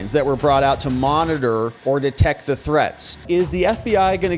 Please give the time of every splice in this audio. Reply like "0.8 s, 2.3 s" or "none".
3.1 s